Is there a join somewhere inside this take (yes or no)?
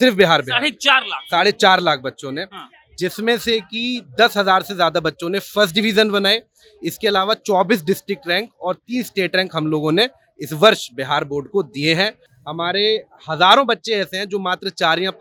no